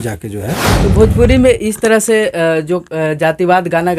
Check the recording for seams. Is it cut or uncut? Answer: cut